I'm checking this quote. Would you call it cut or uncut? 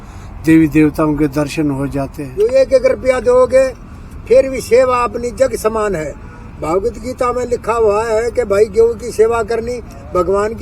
cut